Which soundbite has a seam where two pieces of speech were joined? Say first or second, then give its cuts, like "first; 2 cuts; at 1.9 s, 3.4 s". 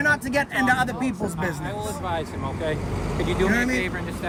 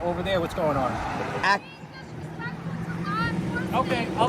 second; 1 cut; at 1.4 s